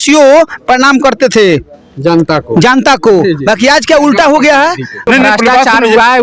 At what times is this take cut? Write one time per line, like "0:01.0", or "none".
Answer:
0:05.1